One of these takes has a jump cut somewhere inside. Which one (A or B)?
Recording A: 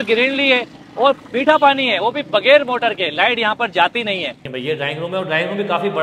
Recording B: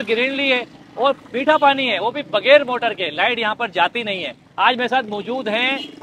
A